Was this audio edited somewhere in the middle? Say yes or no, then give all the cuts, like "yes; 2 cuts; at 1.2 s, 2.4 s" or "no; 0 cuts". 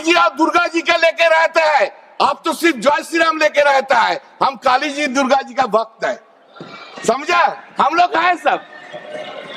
no; 0 cuts